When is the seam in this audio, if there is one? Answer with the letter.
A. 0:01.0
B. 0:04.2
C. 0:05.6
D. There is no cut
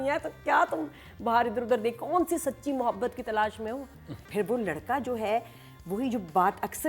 B